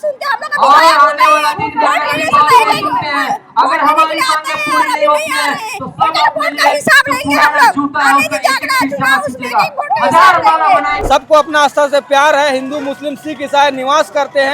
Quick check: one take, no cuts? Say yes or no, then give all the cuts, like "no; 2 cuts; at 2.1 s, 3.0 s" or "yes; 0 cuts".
no; 1 cut; at 11.0 s